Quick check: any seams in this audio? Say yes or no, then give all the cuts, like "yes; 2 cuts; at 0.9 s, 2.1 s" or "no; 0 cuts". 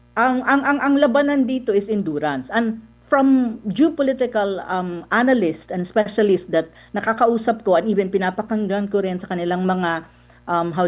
no; 0 cuts